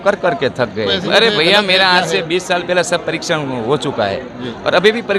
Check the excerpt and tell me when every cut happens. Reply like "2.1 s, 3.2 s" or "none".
1.0 s